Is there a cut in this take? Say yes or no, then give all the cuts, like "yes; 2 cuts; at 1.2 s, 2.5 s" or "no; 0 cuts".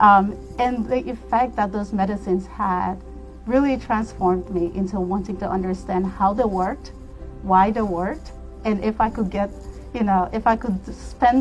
no; 0 cuts